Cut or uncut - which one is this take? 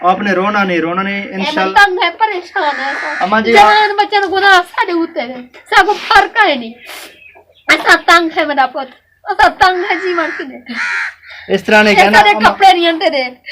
cut